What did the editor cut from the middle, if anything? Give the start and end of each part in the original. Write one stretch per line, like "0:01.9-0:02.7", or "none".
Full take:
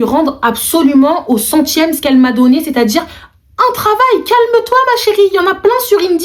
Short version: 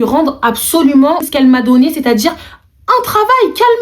0:01.2-0:01.9